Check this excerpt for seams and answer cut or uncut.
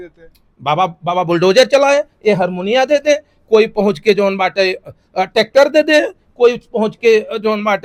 uncut